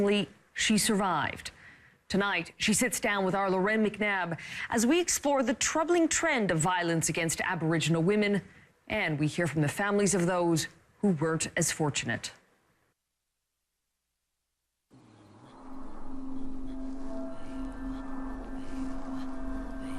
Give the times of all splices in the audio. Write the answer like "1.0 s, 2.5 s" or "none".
9.4 s